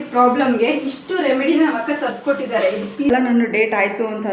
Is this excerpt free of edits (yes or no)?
no